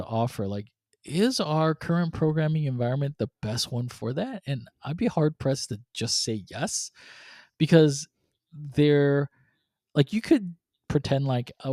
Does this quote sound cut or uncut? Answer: uncut